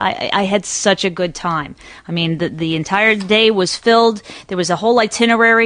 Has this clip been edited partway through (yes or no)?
yes